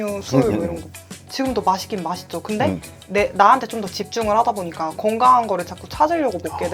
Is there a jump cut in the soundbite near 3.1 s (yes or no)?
no